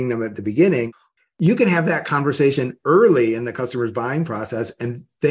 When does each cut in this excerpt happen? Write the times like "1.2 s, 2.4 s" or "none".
0.9 s